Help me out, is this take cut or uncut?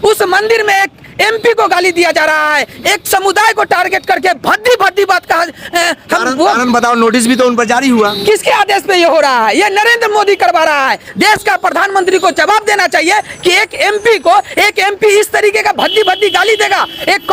uncut